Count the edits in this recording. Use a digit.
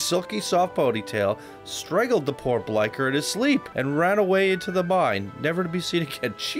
1